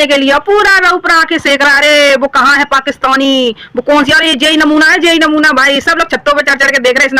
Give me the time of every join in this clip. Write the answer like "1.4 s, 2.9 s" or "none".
none